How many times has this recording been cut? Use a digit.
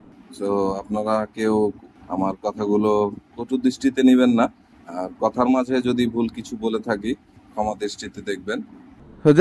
0